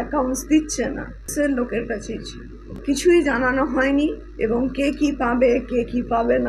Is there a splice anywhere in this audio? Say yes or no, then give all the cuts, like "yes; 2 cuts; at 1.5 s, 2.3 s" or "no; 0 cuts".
yes; 2 cuts; at 1.3 s, 2.8 s